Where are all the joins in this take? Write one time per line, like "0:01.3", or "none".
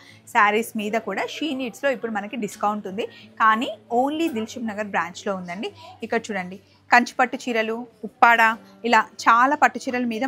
none